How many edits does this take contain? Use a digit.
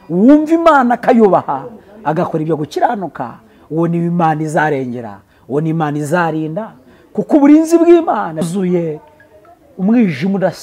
1